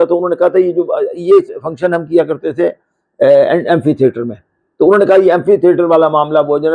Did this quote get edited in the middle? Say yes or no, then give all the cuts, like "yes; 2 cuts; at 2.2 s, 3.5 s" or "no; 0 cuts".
no; 0 cuts